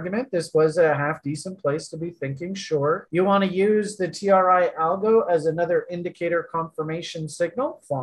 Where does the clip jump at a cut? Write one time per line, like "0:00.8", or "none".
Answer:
0:03.1